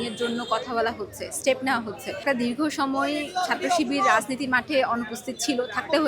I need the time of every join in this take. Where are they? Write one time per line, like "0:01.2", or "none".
0:02.2